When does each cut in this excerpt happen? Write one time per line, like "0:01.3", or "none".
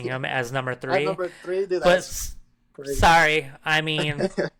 none